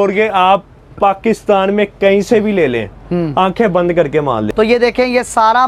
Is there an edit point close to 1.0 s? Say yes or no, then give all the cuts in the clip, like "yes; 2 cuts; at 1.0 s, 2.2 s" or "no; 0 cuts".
no; 1 cut; at 4.5 s